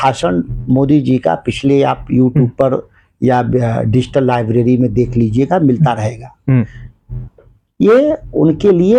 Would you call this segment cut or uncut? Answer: uncut